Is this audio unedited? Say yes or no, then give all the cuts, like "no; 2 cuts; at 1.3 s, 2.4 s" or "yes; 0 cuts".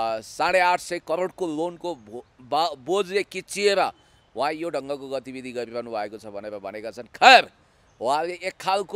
yes; 0 cuts